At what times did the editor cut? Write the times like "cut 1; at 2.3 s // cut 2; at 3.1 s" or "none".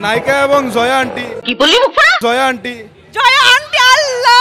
none